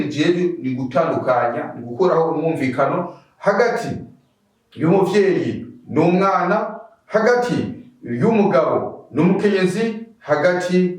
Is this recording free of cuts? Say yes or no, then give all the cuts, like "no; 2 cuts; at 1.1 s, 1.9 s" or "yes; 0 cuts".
yes; 0 cuts